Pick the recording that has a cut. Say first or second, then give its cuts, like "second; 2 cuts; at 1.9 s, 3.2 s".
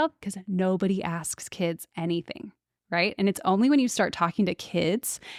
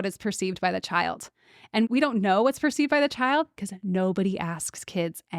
second; 1 cut; at 1.9 s